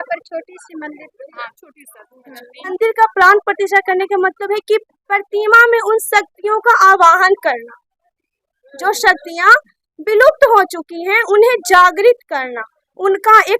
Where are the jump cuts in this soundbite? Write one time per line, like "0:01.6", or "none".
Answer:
0:02.7